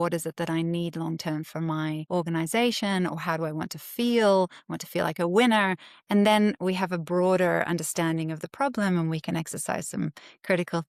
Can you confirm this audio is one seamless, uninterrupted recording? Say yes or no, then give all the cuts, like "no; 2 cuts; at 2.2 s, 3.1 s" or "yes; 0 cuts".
yes; 0 cuts